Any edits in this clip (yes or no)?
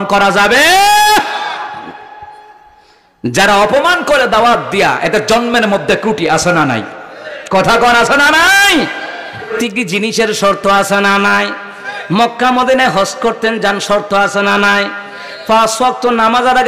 yes